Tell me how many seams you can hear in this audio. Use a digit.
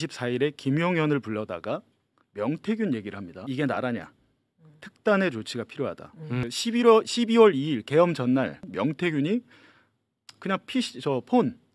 1